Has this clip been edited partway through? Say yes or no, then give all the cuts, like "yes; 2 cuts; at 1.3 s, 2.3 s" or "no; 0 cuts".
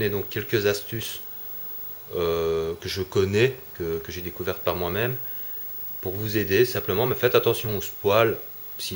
yes; 1 cut; at 8.0 s